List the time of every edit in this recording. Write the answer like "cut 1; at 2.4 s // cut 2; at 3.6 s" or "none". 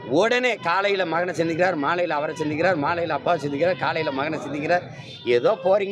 none